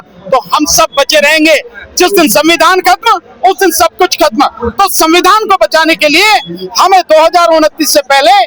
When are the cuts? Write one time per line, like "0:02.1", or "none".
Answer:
none

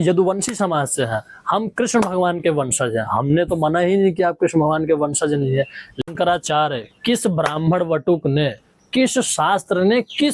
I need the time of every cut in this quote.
0:06.0

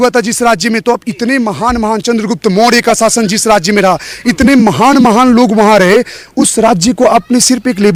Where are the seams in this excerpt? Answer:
none

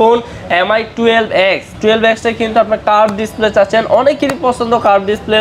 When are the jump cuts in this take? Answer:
none

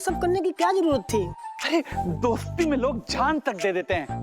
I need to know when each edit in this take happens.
none

